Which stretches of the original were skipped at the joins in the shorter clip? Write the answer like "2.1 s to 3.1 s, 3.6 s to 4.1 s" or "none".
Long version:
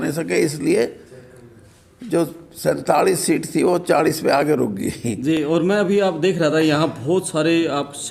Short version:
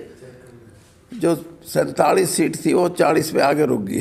none

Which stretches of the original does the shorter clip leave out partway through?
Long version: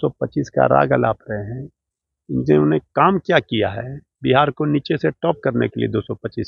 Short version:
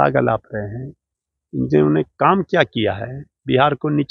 none

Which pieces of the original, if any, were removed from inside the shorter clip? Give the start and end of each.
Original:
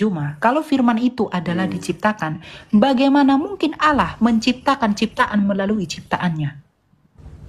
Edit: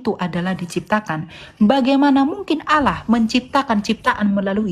none

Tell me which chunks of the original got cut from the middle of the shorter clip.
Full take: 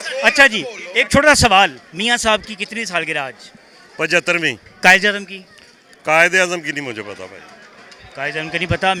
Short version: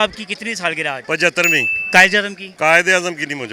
3.3 s to 3.9 s, 5.3 s to 5.9 s

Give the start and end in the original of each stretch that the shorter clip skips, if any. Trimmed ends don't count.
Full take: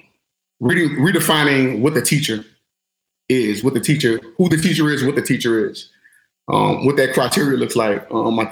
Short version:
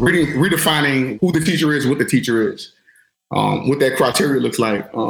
1.7 s to 4.3 s

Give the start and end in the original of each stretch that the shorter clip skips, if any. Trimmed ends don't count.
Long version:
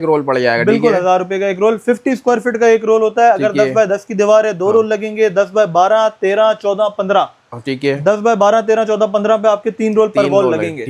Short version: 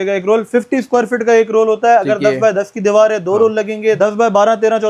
5.3 s to 8.0 s

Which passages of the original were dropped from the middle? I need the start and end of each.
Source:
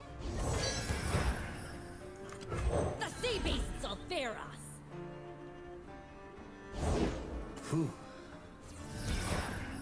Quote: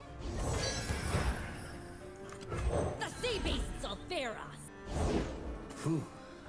4.7 s to 6.5 s

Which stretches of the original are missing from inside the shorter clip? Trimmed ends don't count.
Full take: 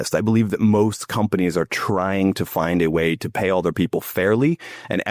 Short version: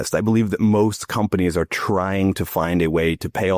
none

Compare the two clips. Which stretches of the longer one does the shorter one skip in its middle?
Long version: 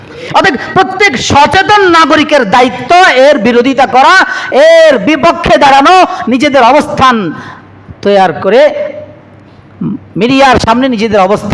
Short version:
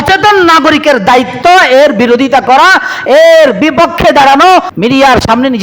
6.2 s to 10.1 s

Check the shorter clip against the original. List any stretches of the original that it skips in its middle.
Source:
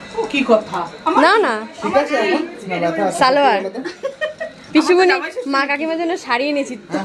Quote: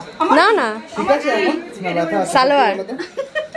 none

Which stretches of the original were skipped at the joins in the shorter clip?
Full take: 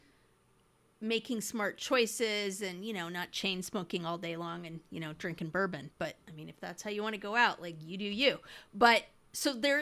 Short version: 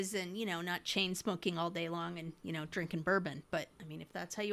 none

